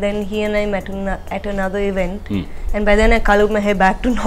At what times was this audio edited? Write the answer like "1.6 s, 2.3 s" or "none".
none